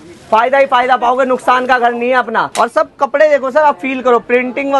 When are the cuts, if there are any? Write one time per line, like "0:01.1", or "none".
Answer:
0:02.5